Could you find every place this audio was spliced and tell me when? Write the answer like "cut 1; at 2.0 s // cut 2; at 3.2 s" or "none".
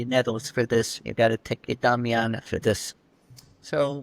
none